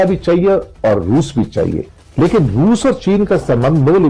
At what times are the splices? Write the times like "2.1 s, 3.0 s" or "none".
1.8 s